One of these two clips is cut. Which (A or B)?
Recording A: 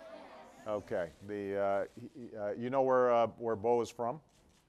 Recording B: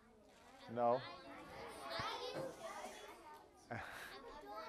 B